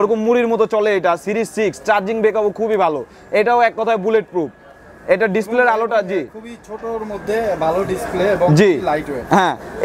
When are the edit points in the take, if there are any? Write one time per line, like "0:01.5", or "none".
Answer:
none